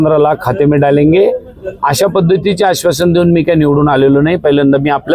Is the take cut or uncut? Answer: uncut